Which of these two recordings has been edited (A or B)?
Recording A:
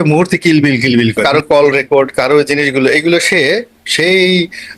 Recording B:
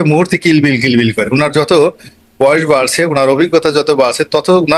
A